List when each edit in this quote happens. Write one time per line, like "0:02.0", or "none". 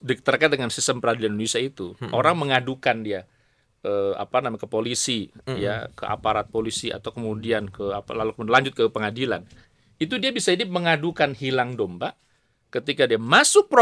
none